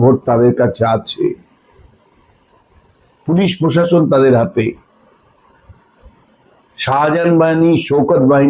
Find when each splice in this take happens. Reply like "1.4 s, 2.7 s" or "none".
none